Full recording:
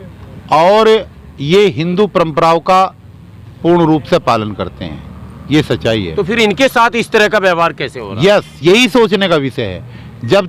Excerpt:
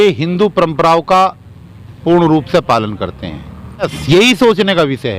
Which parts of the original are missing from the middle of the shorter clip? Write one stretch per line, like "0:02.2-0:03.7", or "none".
0:05.5-0:08.4